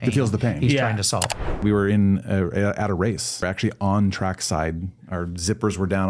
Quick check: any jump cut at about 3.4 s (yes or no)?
yes